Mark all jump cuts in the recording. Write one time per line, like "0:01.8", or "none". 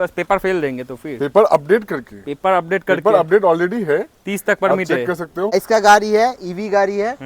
0:05.5